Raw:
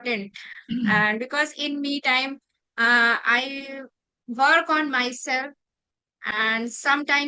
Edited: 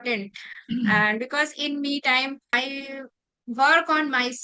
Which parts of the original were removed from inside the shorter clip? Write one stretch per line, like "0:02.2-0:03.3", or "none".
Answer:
0:02.6-0:03.4